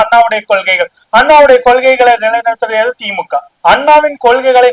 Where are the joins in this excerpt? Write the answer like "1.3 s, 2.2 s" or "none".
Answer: 3.5 s